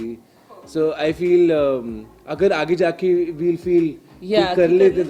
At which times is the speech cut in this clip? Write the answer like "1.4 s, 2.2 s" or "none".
none